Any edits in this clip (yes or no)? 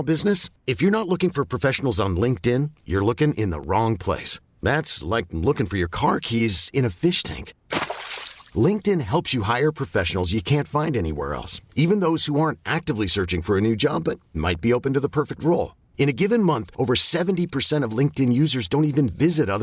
no